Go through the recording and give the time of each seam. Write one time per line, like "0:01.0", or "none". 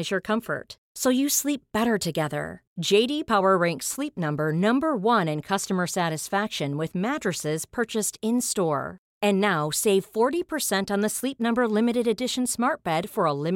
none